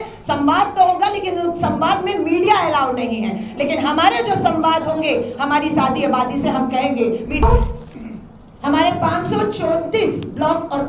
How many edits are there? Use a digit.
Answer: 1